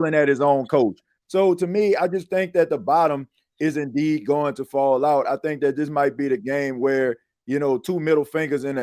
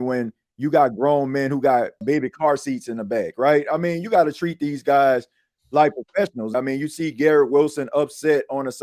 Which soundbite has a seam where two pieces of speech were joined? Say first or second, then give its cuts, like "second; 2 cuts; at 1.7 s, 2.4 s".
second; 2 cuts; at 2.0 s, 6.5 s